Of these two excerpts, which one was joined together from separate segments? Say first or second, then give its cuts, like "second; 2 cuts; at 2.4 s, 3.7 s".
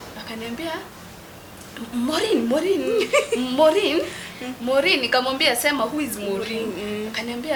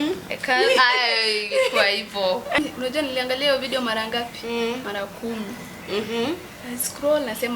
second; 1 cut; at 2.6 s